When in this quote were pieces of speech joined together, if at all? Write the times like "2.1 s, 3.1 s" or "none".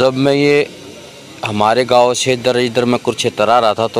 none